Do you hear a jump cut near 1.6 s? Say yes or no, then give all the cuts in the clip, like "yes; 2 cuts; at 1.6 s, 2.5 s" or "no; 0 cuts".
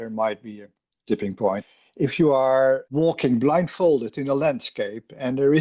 yes; 2 cuts; at 1.6 s, 2.9 s